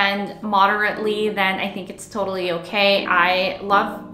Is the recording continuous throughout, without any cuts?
no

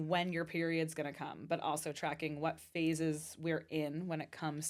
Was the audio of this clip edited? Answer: no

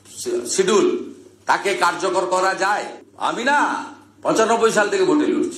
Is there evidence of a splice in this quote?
yes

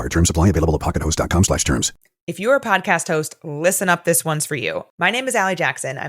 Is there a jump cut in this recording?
yes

